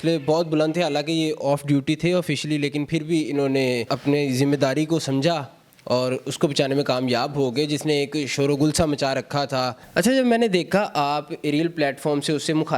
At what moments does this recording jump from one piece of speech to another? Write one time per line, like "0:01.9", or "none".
0:03.9
0:09.8